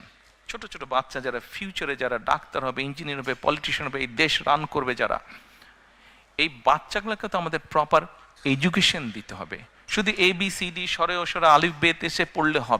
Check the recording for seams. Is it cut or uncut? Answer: uncut